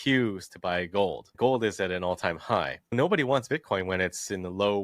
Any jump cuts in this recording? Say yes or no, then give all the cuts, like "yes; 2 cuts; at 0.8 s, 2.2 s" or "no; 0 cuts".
yes; 2 cuts; at 1.3 s, 2.9 s